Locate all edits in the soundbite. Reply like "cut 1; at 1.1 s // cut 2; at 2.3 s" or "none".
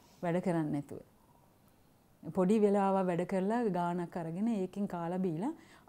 none